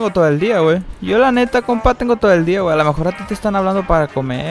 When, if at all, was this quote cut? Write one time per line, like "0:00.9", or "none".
0:00.9